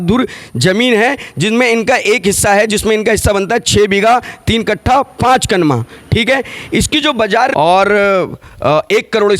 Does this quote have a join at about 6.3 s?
no; 1 cut; at 7.5 s

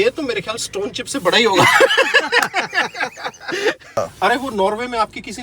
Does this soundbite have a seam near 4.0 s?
yes; 1 cut; at 4.0 s

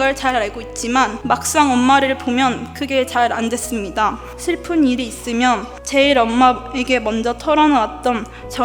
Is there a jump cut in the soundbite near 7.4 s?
no; 3 cuts; at 1.2 s, 4.3 s, 5.7 s

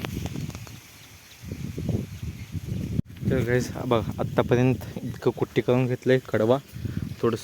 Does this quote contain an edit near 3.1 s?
yes; 1 cut; at 3.1 s

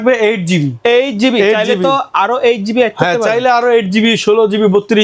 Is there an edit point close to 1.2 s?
no; 0 cuts

